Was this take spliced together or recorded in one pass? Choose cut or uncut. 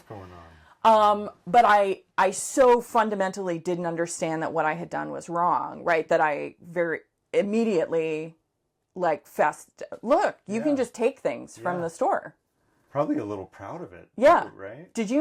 uncut